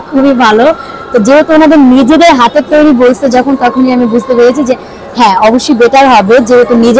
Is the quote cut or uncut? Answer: uncut